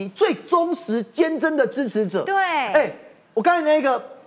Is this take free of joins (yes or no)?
yes